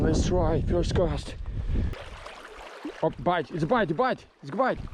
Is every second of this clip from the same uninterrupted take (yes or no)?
no